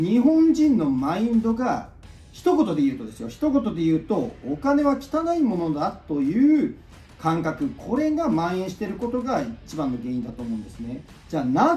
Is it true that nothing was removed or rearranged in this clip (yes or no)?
yes